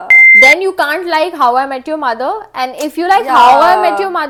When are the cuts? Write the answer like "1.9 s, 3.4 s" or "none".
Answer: none